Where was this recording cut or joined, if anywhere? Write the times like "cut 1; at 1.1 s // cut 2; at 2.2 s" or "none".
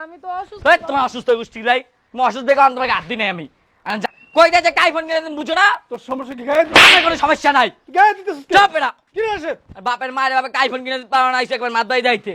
cut 1; at 4.0 s